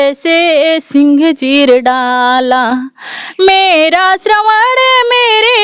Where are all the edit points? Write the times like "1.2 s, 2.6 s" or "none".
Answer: none